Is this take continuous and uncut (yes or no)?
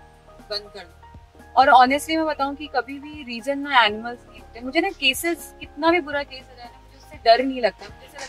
yes